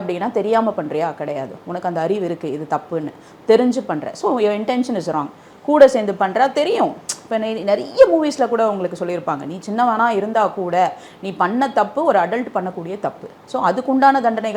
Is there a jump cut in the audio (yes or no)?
no